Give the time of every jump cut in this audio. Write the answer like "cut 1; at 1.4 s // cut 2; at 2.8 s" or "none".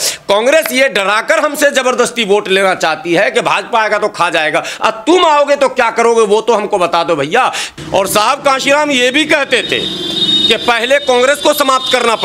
cut 1; at 7.8 s

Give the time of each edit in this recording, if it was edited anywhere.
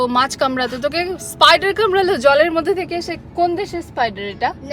none

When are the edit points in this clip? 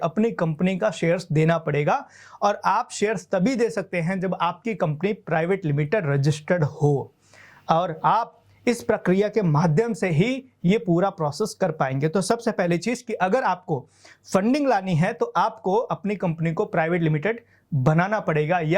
none

